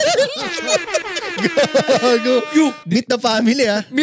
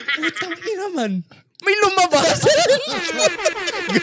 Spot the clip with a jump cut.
first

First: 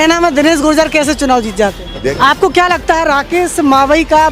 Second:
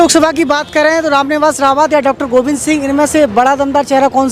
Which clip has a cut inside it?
first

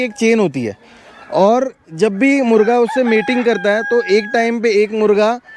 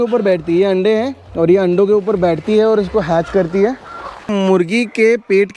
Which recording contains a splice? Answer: second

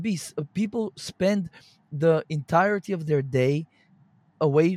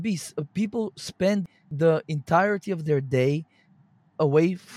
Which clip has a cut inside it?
second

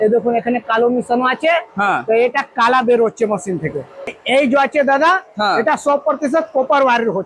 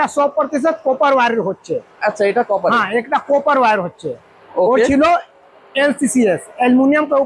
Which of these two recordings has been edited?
first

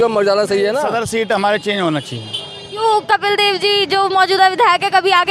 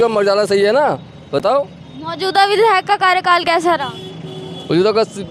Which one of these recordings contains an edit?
first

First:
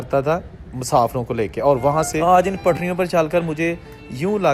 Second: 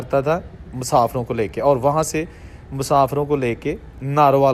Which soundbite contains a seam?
first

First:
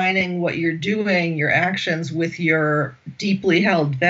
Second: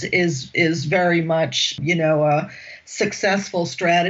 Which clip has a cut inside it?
second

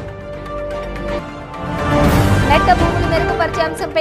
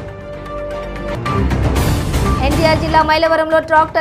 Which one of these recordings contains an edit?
second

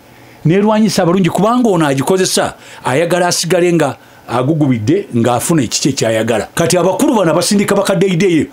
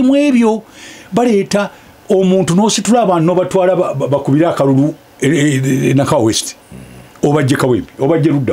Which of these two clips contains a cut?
first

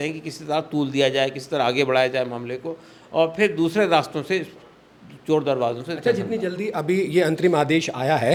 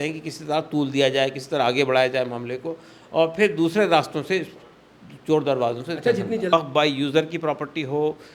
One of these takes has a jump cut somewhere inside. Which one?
second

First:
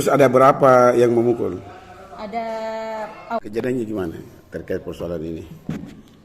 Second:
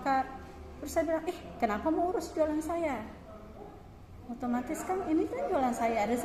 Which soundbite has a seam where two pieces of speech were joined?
first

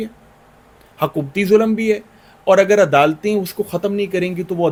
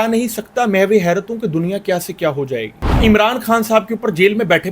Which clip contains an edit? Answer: second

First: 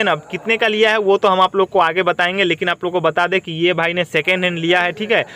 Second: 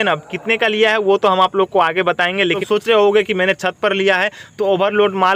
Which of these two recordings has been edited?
second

